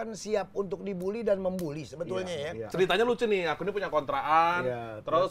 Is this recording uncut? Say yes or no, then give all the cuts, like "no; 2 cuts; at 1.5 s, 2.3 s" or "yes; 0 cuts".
no; 1 cut; at 2.6 s